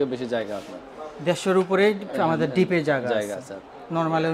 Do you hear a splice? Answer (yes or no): no